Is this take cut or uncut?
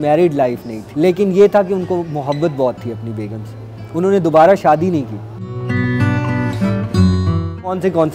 uncut